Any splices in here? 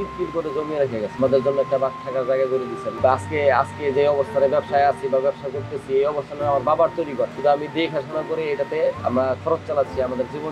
yes; 3 cuts; at 1.1 s, 2.8 s, 7.3 s

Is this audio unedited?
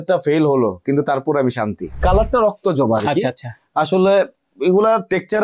no; 1 cut; at 2.0 s

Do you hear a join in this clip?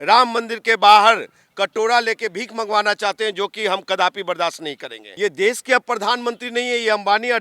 yes; 1 cut; at 5.0 s

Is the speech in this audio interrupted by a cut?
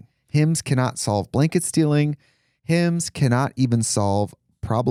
no; 0 cuts

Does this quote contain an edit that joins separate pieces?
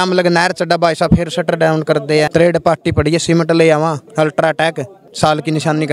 yes; 3 cuts; at 2.3 s, 4.0 s, 5.0 s

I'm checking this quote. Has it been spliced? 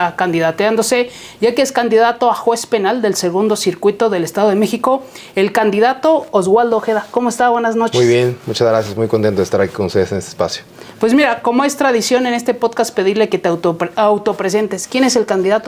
no; 0 cuts

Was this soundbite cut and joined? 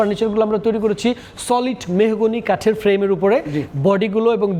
no; 0 cuts

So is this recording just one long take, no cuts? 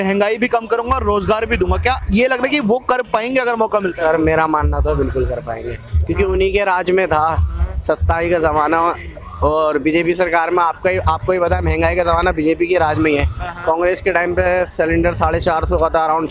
yes; 0 cuts

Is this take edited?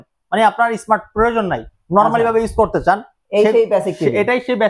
no; 0 cuts

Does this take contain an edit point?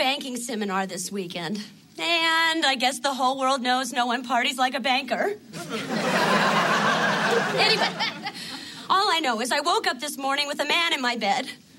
yes; 1 cut; at 6.6 s

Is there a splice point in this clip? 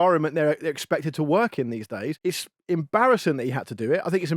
yes; 1 cut; at 2.1 s

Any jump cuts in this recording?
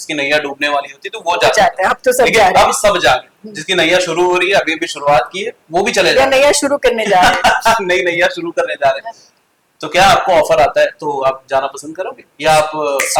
no; 0 cuts

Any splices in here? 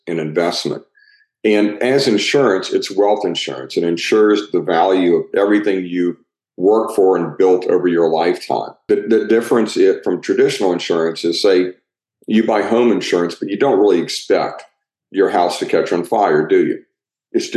yes; 1 cut; at 8.8 s

